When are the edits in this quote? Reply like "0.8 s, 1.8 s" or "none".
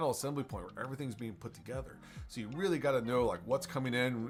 none

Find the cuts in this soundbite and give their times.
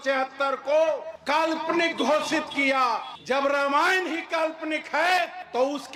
none

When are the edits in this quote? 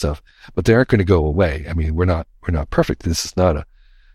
none

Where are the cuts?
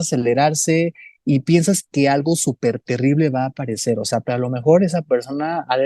1.1 s, 4.2 s

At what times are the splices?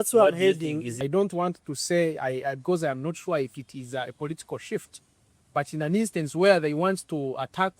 1.0 s

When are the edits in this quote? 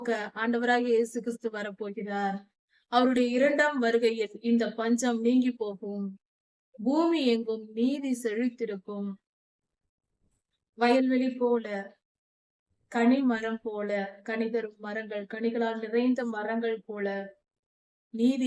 none

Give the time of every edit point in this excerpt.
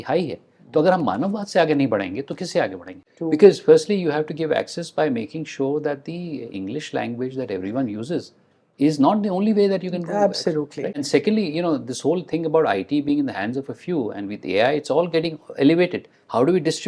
2.9 s, 10.8 s

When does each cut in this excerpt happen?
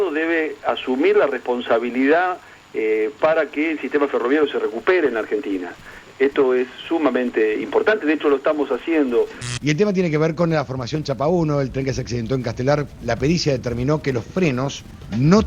9.4 s, 12.9 s

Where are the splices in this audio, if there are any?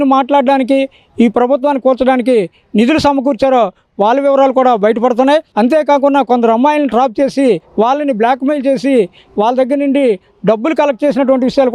none

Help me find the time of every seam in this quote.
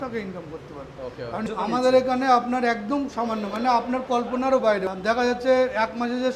1.4 s, 4.9 s

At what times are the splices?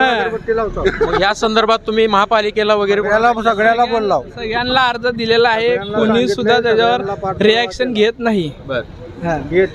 none

